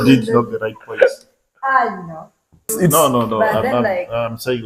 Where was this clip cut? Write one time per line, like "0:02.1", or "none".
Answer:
0:02.7